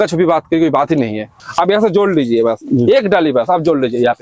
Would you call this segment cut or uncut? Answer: cut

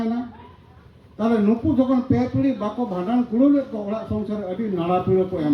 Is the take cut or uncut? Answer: uncut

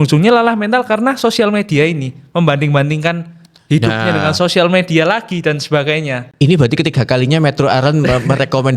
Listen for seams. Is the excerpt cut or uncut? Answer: uncut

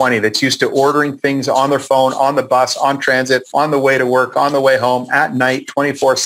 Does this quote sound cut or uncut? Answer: cut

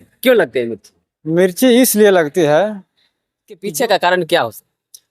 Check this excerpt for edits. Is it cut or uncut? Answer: cut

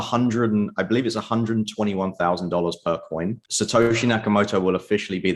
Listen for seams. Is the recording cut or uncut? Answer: cut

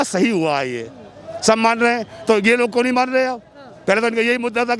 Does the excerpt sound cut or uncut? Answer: uncut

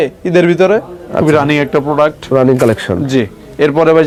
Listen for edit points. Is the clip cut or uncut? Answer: uncut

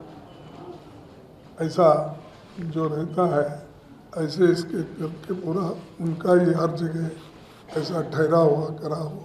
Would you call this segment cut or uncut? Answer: uncut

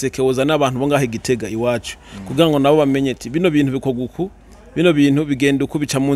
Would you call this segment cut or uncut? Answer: uncut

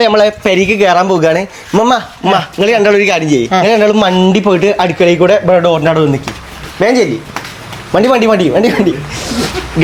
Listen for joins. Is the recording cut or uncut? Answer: uncut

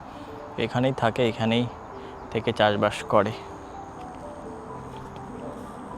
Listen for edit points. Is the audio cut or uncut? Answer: uncut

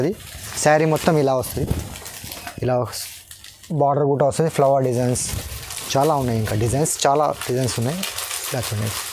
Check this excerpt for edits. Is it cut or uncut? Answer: uncut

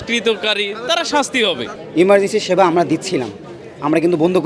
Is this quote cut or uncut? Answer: cut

